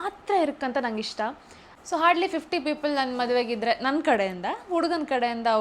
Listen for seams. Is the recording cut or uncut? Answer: uncut